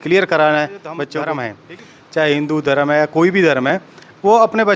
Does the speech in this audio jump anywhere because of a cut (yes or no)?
yes